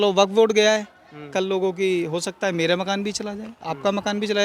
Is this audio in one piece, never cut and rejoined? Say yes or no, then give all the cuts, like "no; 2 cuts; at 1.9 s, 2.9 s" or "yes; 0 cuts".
yes; 0 cuts